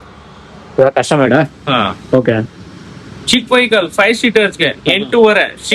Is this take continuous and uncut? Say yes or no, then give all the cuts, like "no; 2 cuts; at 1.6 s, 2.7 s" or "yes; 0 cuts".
yes; 0 cuts